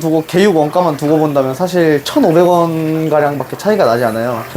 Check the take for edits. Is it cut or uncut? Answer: uncut